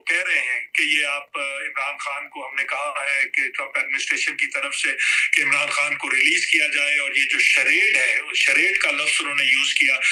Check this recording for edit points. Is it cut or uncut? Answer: uncut